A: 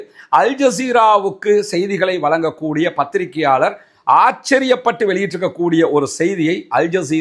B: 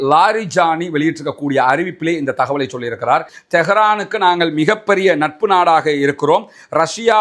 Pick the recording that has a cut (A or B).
B